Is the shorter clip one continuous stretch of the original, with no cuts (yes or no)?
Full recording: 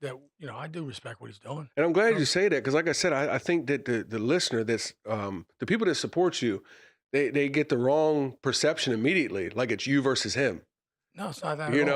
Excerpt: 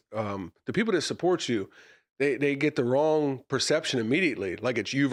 yes